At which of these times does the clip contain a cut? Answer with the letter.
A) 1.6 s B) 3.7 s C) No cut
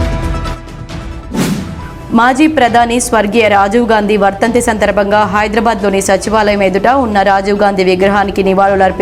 A